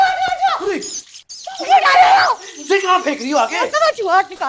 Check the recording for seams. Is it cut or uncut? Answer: uncut